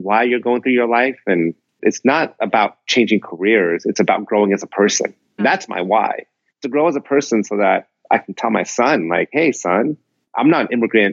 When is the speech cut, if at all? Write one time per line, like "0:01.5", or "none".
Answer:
0:01.8
0:05.4